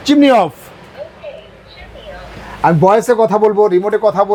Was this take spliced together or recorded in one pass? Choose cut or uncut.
uncut